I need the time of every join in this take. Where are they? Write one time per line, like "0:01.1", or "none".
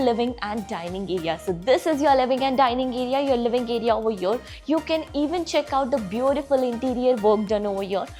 none